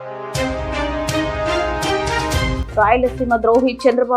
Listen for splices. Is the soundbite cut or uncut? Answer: cut